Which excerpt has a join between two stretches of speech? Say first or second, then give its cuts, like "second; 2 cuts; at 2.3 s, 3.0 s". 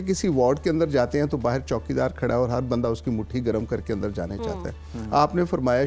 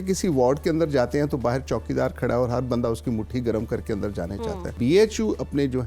second; 1 cut; at 4.7 s